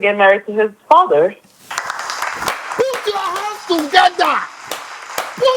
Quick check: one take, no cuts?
yes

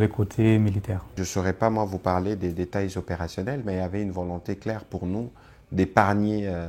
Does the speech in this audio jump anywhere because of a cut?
no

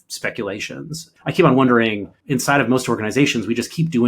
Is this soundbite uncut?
no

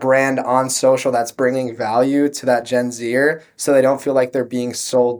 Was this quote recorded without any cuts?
yes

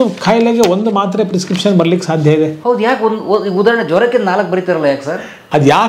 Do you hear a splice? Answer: no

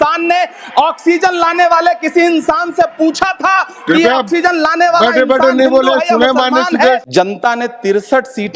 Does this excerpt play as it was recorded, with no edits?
no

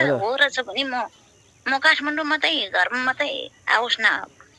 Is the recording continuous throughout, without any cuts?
yes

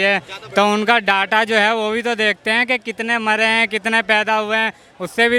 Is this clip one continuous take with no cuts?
yes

